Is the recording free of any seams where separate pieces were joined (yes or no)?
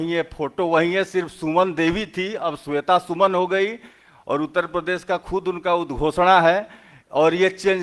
yes